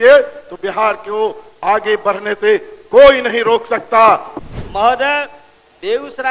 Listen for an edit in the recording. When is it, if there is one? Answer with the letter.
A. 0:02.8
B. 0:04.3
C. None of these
B